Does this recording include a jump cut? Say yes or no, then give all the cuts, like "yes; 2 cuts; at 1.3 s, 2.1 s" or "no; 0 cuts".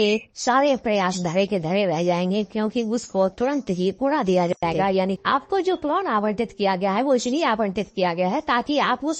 yes; 1 cut; at 5.2 s